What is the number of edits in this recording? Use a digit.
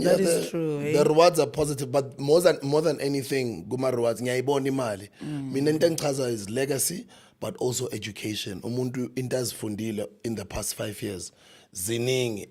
0